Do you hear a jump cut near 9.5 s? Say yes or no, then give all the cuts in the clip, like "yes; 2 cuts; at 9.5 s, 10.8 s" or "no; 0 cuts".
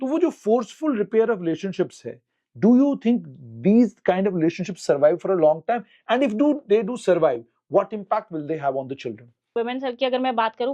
yes; 1 cut; at 9.5 s